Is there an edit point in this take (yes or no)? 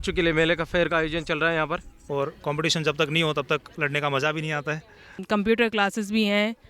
yes